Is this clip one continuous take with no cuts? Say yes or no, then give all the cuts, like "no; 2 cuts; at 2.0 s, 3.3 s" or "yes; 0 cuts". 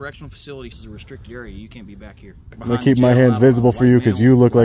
no; 2 cuts; at 0.8 s, 2.5 s